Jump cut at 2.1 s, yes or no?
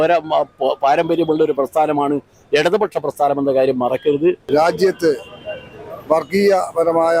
no